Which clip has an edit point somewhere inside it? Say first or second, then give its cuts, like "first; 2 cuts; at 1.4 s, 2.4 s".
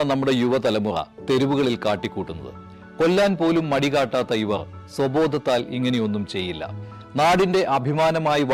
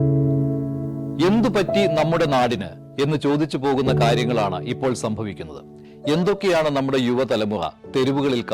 second; 1 cut; at 2.5 s